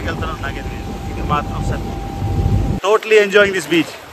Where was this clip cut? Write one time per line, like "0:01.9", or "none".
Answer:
0:02.8